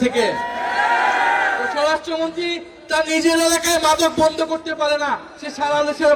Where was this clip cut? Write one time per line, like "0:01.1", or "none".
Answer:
none